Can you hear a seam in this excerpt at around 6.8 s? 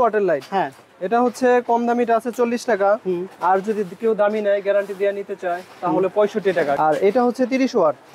yes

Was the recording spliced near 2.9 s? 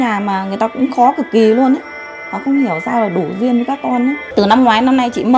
no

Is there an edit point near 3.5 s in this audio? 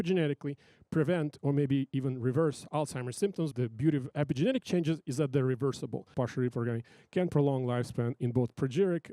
yes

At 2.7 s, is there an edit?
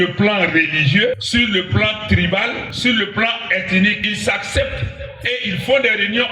yes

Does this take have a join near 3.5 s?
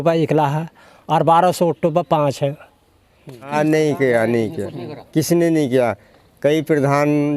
yes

